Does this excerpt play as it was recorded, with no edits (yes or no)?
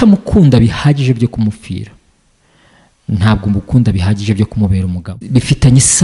no